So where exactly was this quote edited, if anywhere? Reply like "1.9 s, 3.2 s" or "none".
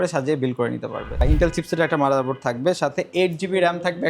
1.1 s

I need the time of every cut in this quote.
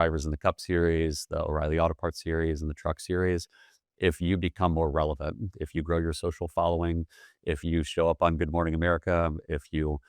none

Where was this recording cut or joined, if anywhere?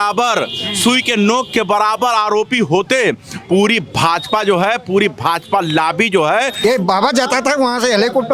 6.5 s

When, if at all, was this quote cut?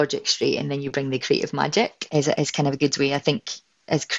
2.0 s

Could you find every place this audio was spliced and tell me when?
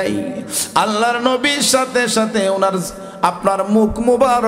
none

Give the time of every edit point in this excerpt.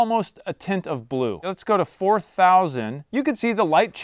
1.5 s

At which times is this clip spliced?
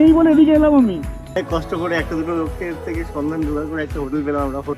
1.4 s

